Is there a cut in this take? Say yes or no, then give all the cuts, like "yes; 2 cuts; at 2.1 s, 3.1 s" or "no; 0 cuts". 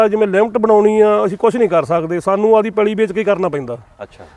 no; 0 cuts